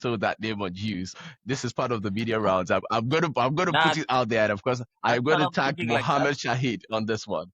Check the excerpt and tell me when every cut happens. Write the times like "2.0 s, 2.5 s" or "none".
1.1 s, 2.8 s